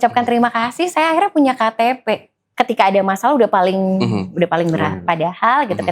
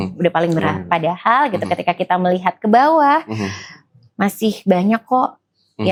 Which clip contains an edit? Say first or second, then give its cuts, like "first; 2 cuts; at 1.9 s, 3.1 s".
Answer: first; 1 cut; at 2.4 s